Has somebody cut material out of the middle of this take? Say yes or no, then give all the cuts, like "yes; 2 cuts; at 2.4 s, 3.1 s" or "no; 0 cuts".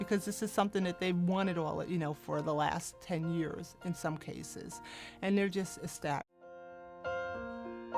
no; 0 cuts